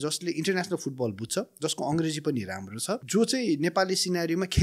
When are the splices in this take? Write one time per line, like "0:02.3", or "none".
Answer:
0:03.0